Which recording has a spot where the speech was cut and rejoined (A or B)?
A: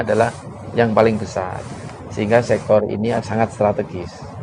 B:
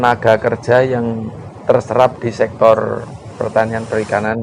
A